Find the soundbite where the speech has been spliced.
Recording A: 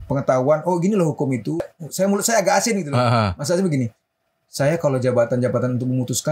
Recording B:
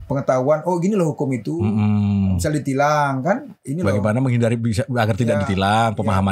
A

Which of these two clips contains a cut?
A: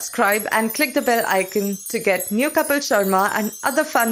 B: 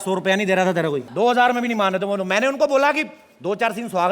B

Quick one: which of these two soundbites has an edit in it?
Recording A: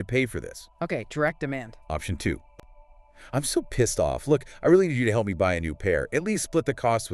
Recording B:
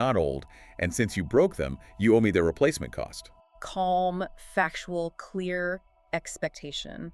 A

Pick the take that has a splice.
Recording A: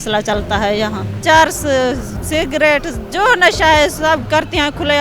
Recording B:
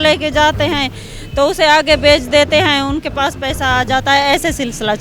A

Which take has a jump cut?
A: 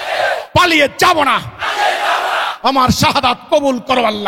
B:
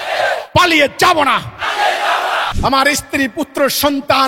B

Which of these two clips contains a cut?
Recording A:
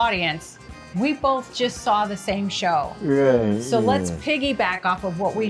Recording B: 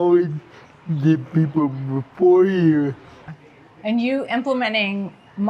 B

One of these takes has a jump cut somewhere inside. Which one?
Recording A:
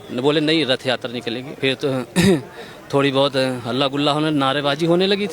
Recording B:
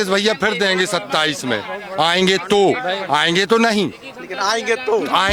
A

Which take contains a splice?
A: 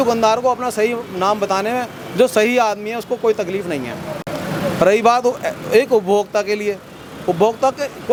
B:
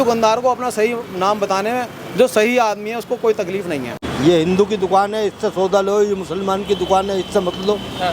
B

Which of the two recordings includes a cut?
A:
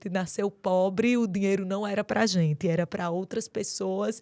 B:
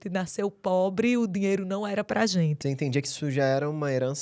B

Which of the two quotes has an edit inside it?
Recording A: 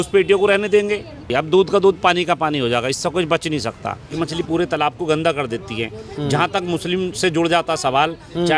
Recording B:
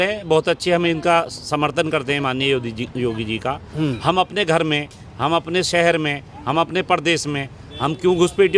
A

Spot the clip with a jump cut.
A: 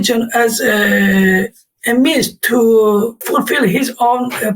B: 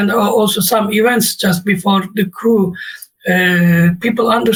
A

